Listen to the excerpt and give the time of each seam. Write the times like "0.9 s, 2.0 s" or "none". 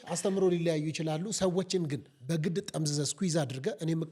none